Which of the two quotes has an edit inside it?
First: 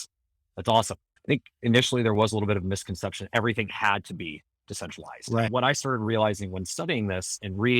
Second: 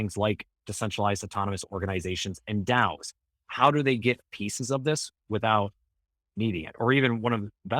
first; 2 cuts; at 1.1 s, 5.5 s

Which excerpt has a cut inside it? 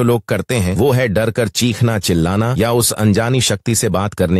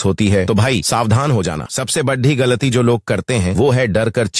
second; 1 cut; at 1.6 s

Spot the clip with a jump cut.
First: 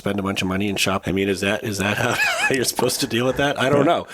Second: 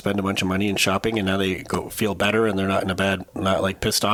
first; 1 cut; at 1.0 s

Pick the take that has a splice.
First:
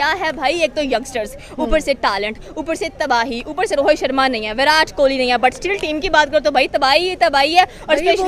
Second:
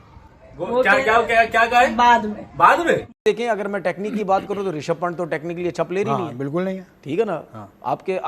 second; 1 cut; at 3.2 s

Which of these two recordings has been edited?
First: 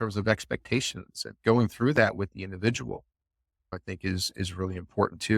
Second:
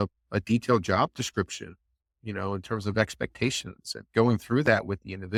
first; 1 cut; at 3.8 s

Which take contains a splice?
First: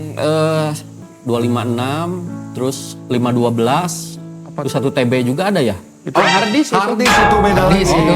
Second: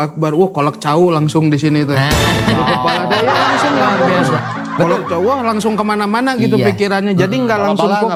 first; 1 cut; at 1.1 s

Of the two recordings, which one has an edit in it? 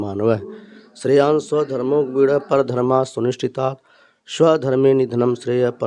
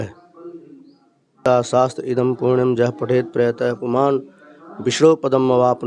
second; 1 cut; at 1.4 s

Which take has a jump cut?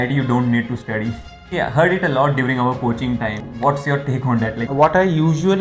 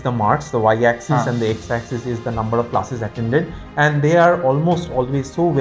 first; 3 cuts; at 1.5 s, 3.4 s, 4.7 s

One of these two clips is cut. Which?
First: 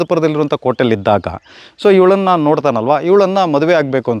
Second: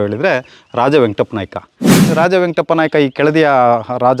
second; 1 cut; at 2.0 s

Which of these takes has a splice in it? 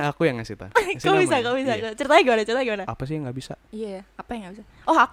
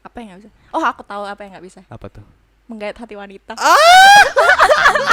first; 1 cut; at 2.9 s

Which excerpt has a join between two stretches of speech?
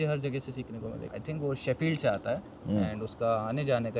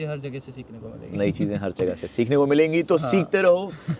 first; 1 cut; at 1.1 s

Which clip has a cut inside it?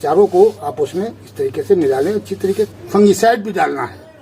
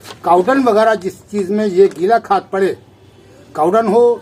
first; 1 cut; at 2.7 s

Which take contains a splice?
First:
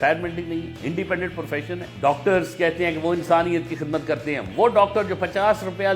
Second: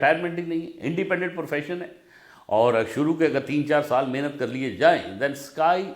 first; 1 cut; at 1.9 s

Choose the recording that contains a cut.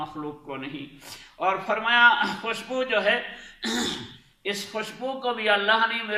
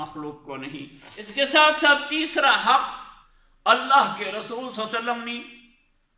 second; 1 cut; at 1.3 s

